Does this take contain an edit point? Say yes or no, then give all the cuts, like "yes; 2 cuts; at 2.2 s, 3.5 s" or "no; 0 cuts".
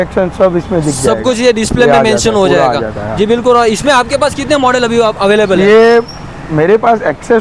no; 0 cuts